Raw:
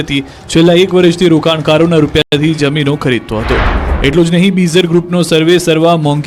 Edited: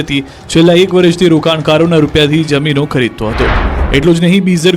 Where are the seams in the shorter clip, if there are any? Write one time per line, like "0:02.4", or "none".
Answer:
0:02.2